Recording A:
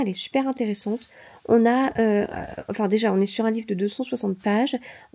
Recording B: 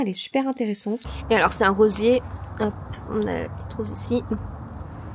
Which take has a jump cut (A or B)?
B